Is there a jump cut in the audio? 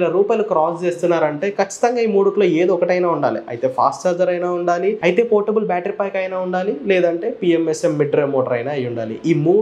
no; 0 cuts

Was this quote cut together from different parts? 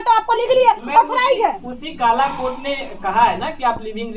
no; 0 cuts

